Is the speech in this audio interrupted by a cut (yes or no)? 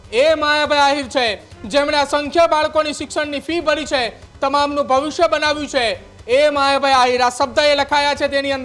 no